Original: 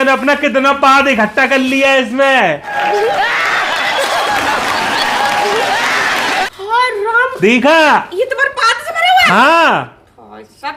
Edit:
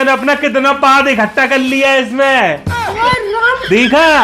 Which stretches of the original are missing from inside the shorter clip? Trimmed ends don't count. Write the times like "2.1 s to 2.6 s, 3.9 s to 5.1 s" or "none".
2.7 s to 6.5 s